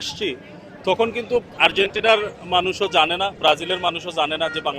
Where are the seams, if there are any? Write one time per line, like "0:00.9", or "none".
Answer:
0:01.4